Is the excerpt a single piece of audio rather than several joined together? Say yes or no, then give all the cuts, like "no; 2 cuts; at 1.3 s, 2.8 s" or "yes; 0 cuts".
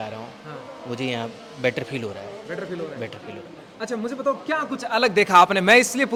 yes; 0 cuts